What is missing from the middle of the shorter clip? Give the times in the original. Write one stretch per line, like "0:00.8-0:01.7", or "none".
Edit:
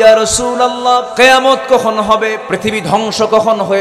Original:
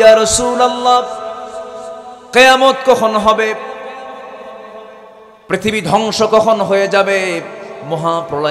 0:01.1-0:02.3
0:03.6-0:05.4

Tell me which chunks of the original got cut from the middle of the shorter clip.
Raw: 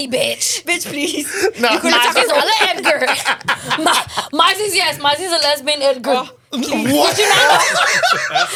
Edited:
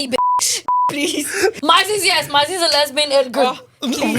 0:01.6-0:04.3

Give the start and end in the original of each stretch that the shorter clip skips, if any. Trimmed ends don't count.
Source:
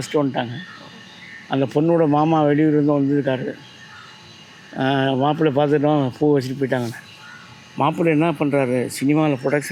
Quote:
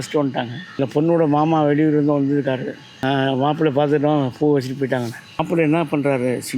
0:00.8-0:01.6
0:03.7-0:04.7
0:07.2-0:07.9

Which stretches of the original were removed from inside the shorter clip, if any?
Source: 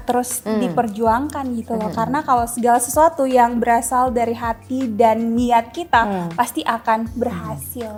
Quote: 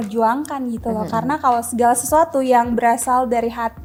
none

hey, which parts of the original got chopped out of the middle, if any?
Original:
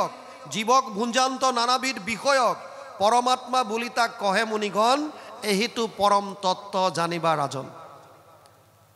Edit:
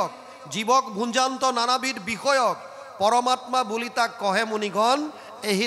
none

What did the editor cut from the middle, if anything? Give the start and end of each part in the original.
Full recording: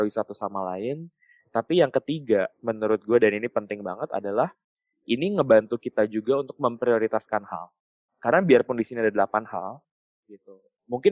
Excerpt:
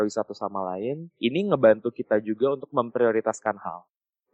0:01.1-0:04.9

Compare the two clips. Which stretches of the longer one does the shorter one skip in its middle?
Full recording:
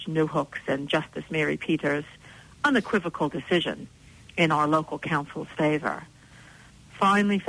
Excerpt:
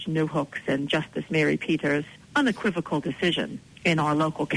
0:02.2-0:02.5
0:03.9-0:04.2

